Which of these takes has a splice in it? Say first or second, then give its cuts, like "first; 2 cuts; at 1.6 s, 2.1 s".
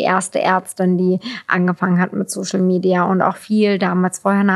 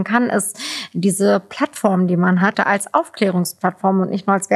second; 1 cut; at 2.6 s